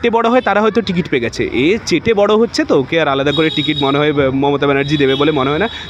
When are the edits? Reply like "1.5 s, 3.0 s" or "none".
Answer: none